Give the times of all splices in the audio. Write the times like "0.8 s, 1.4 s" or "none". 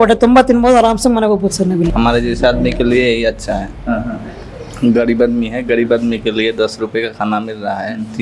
1.9 s